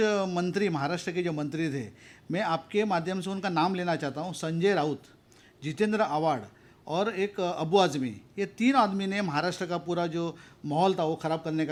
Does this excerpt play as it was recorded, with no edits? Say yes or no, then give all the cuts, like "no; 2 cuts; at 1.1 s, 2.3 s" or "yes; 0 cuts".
yes; 0 cuts